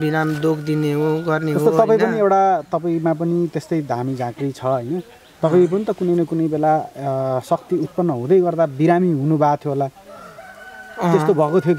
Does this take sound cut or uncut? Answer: uncut